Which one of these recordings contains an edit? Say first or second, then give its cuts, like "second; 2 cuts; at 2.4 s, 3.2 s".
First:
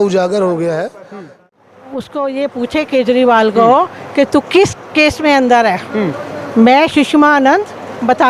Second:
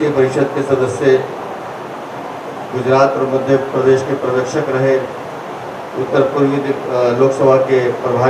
first; 1 cut; at 1.1 s